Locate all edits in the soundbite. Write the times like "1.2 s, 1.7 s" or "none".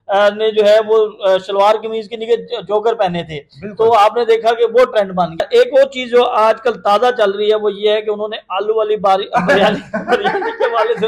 5.4 s